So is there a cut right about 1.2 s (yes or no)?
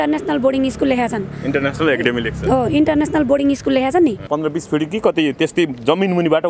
no